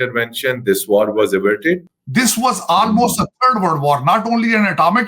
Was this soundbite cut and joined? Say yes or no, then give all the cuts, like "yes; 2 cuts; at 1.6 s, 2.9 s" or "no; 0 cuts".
yes; 1 cut; at 2.0 s